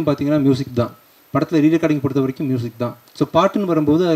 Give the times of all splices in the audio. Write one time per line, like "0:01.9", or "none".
0:03.0